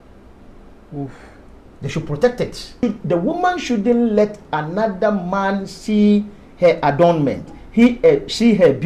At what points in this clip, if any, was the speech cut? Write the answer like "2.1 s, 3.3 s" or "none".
2.8 s